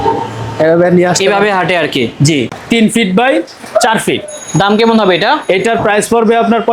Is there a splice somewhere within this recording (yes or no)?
yes